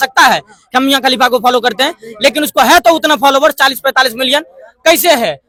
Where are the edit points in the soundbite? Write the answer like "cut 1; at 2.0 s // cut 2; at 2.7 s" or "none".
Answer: none